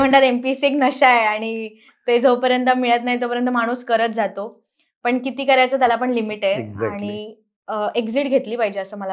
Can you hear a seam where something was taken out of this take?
no; 0 cuts

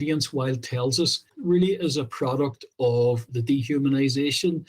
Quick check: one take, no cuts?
no; 2 cuts; at 1.3 s, 3.2 s

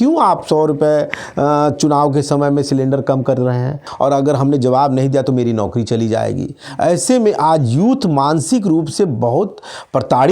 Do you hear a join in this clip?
yes; 1 cut; at 3.9 s

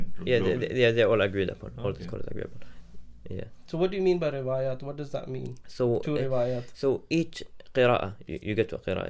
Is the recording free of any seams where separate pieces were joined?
yes; 0 cuts

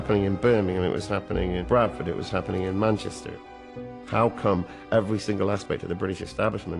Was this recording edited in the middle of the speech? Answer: yes; 2 cuts; at 1.6 s, 3.7 s

